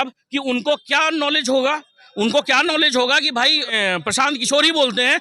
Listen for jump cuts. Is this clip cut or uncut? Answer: cut